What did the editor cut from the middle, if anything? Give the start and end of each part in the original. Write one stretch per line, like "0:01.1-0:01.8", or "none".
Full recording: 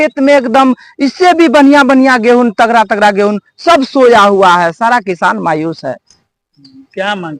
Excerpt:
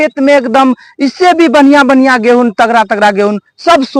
none